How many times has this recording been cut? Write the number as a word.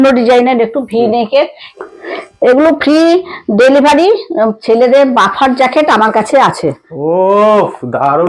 two